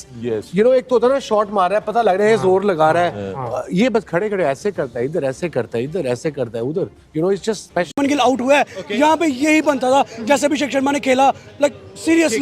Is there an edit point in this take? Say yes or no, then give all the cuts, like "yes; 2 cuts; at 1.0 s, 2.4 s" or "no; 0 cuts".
yes; 1 cut; at 7.9 s